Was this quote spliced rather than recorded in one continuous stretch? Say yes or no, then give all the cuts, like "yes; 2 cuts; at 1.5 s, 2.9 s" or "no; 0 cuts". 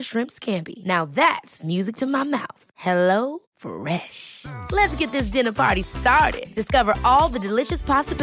no; 0 cuts